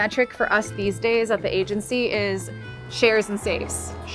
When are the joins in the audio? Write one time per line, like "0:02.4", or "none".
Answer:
none